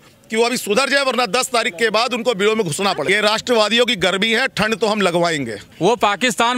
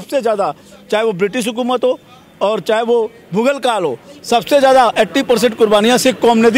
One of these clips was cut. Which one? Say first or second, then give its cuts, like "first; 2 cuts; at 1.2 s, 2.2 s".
first; 2 cuts; at 3.0 s, 5.6 s